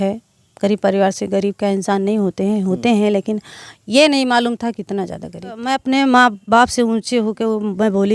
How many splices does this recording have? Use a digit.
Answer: 1